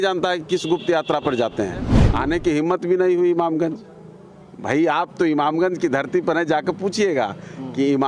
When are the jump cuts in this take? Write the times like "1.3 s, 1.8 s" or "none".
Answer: 2.0 s